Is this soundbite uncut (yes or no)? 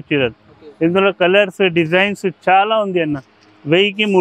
yes